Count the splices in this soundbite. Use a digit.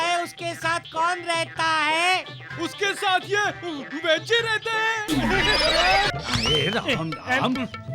1